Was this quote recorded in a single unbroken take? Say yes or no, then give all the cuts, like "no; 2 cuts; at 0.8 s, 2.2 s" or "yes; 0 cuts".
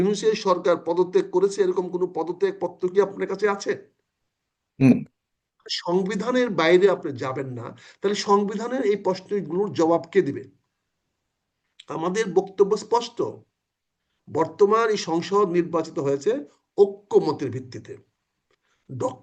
yes; 0 cuts